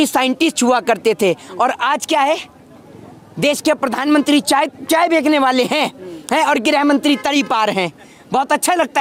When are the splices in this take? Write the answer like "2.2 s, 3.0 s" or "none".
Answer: none